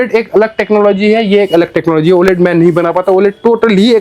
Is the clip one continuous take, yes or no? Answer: yes